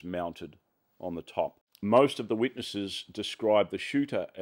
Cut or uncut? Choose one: cut